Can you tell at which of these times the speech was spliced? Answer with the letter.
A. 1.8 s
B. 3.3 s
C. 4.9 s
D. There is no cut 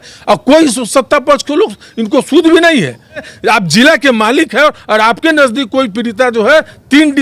B